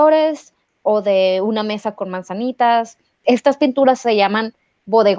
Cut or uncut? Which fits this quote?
cut